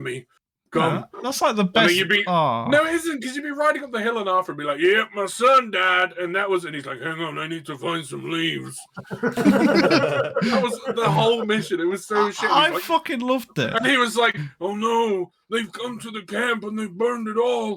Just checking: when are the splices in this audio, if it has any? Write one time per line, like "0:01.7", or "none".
none